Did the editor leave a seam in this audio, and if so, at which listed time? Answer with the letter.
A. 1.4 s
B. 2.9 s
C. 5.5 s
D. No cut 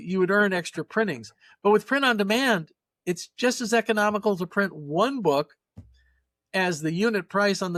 D